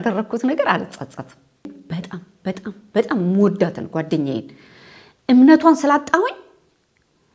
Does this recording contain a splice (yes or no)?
yes